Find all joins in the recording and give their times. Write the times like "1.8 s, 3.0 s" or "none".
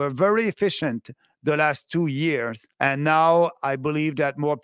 2.6 s